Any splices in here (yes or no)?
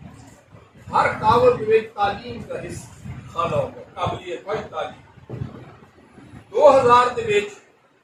no